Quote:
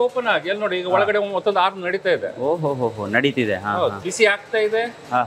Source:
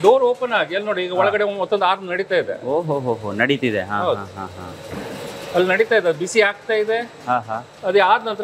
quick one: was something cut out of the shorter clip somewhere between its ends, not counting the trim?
yes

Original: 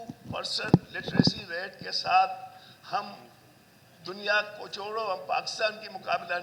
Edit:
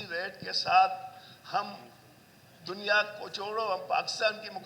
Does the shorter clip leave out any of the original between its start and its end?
no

